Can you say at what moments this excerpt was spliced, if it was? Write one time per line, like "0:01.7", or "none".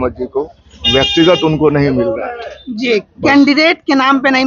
none